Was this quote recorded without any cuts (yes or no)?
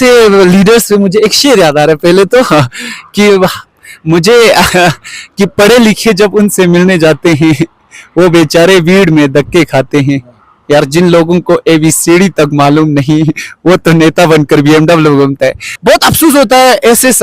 no